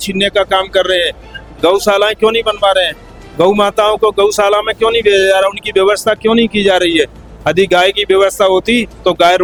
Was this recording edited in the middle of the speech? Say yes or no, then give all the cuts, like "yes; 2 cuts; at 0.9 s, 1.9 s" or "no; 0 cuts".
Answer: no; 0 cuts